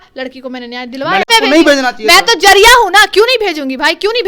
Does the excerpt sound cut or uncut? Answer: cut